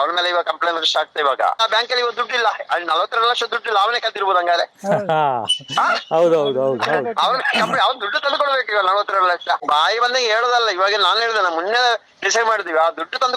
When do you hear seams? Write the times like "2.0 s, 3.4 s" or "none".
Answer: 1.6 s, 9.6 s